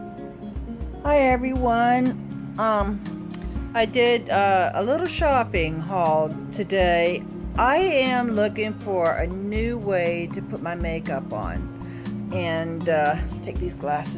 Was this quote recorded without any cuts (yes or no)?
no